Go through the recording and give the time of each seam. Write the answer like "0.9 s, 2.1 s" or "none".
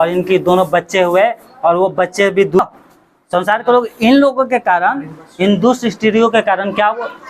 2.6 s